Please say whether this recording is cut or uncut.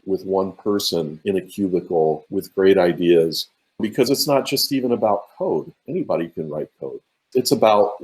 cut